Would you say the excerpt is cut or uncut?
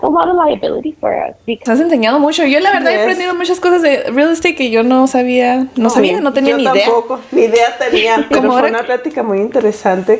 cut